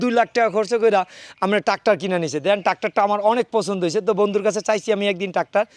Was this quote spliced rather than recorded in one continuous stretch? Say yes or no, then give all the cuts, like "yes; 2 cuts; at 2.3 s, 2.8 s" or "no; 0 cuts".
no; 0 cuts